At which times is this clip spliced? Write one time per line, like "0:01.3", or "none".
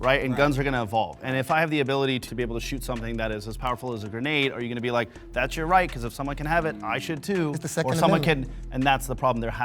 0:02.3

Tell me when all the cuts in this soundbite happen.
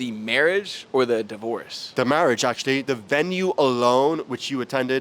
0:01.9
0:02.8

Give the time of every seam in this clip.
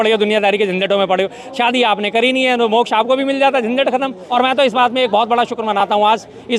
0:04.2

